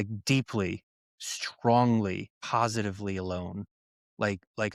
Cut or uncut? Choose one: cut